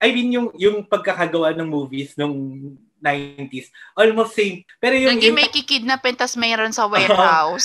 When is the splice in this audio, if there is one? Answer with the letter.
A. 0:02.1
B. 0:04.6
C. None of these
B